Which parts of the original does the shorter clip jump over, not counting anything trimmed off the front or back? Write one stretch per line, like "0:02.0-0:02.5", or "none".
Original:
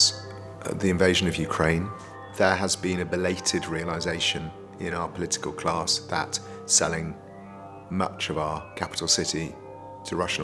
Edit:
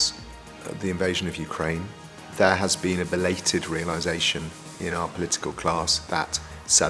none